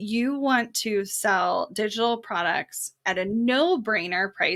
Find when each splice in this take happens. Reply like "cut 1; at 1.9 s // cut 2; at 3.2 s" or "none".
none